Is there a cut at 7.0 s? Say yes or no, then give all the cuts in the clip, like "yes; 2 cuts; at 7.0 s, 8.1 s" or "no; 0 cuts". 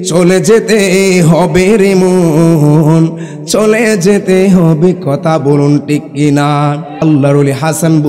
yes; 1 cut; at 7.0 s